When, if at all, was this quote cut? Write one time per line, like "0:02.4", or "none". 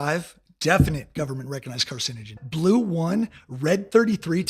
0:02.4